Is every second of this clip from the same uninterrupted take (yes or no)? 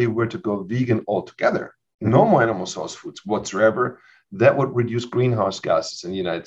yes